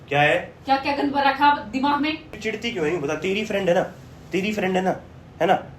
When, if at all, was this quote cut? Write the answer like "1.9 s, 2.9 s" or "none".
2.3 s